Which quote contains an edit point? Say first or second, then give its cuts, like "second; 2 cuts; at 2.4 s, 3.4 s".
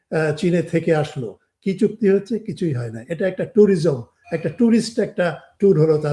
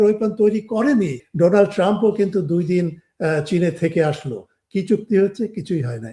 second; 1 cut; at 1.2 s